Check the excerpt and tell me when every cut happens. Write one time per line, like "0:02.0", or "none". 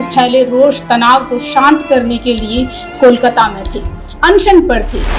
none